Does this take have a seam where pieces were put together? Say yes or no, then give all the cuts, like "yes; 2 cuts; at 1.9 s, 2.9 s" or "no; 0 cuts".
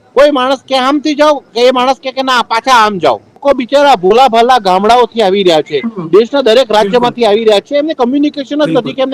yes; 1 cut; at 3.4 s